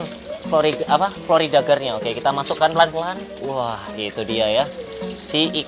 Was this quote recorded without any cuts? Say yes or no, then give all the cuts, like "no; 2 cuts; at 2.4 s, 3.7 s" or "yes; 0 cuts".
yes; 0 cuts